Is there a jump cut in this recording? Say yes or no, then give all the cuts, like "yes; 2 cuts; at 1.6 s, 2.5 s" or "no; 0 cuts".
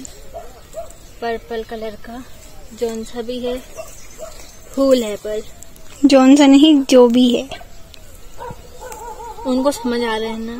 no; 0 cuts